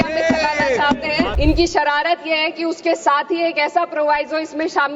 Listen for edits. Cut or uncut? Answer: cut